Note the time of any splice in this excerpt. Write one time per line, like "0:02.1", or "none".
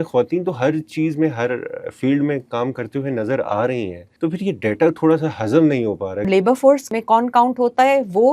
0:04.0
0:06.3
0:06.9